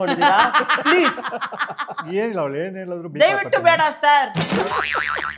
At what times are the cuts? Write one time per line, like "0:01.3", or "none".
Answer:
0:02.1